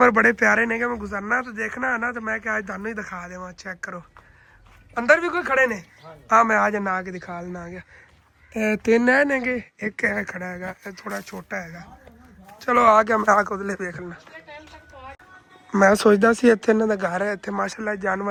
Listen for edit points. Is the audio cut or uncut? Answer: uncut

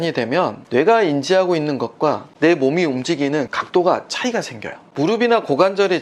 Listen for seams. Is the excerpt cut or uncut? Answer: cut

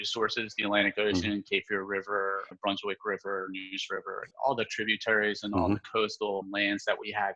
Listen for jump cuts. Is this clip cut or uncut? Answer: cut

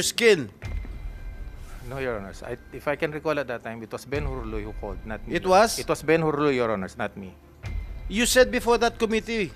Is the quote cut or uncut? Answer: uncut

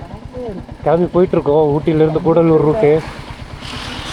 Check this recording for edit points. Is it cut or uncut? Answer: uncut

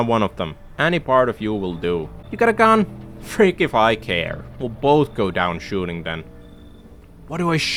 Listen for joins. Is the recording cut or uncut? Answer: uncut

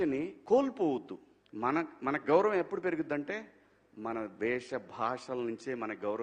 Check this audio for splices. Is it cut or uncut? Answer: uncut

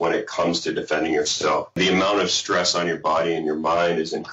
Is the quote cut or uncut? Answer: cut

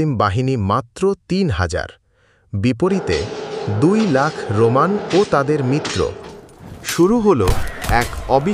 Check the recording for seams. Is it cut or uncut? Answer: cut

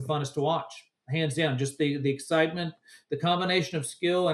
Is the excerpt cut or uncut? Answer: uncut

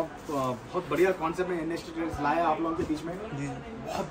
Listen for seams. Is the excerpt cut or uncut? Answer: uncut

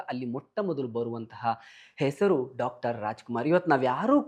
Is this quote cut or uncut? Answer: uncut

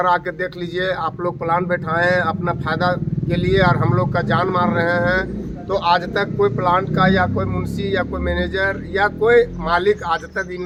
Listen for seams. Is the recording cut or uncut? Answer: uncut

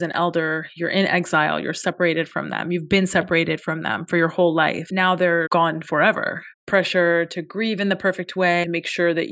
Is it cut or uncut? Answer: cut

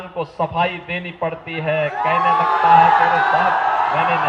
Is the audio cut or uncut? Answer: uncut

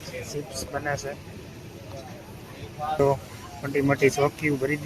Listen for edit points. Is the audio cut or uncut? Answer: cut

